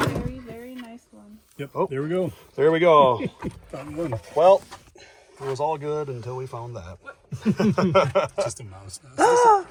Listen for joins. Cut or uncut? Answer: uncut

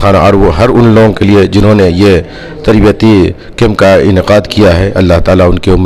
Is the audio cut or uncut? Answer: uncut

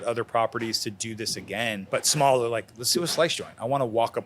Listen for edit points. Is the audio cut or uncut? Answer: cut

